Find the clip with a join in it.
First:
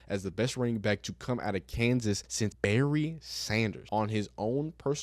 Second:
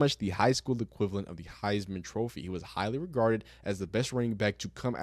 first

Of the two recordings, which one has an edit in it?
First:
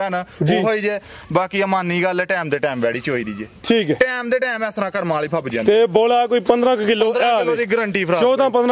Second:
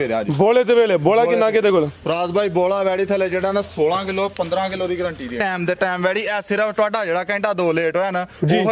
second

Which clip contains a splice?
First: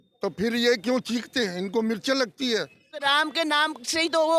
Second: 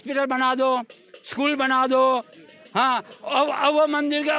first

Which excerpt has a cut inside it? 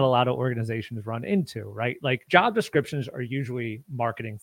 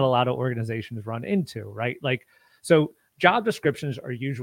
first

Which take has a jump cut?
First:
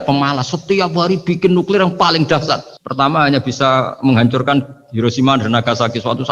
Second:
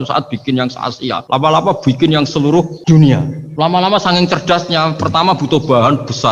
second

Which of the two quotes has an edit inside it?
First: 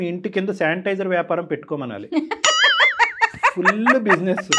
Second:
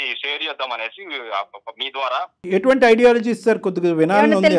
second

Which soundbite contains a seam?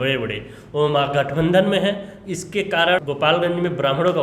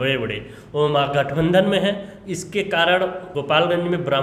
first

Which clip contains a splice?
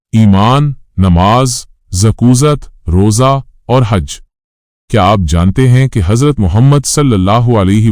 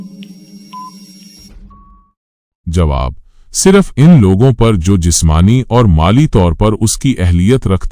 second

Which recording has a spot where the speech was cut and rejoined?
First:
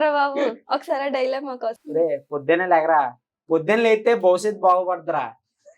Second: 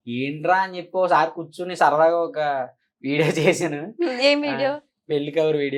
first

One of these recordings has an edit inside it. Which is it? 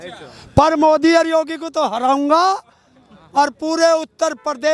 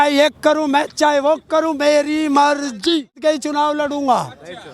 second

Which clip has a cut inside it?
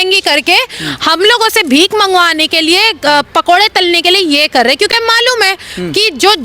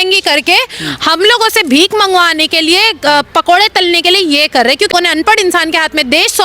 second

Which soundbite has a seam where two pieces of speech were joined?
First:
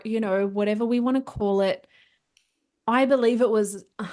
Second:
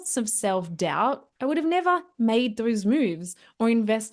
second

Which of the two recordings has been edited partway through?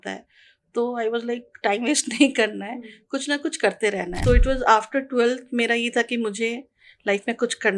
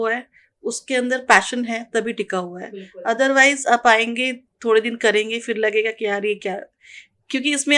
first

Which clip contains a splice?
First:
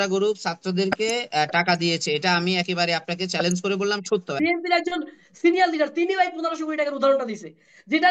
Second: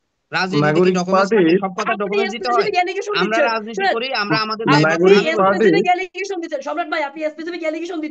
first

